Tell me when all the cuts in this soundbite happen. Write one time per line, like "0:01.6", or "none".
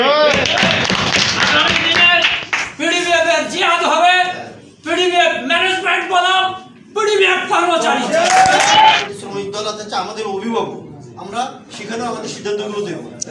0:09.0